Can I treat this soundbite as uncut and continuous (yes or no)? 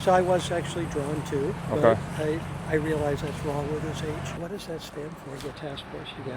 no